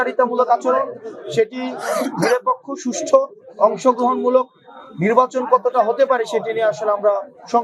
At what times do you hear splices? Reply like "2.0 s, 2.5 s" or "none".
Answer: none